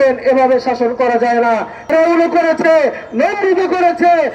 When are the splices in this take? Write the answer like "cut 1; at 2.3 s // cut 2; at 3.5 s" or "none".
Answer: cut 1; at 1.8 s